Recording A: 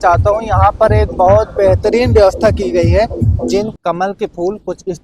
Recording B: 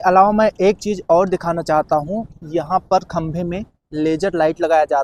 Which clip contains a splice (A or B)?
A